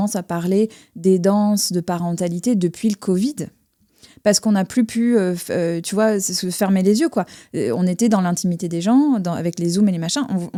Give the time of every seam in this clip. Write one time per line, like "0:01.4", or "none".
none